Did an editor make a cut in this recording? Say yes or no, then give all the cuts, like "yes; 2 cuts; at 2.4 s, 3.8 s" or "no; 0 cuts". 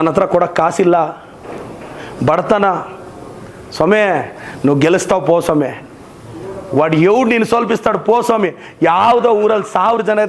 no; 0 cuts